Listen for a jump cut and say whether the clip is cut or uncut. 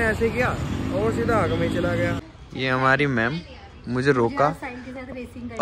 cut